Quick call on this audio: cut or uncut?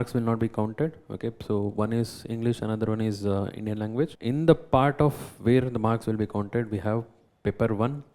cut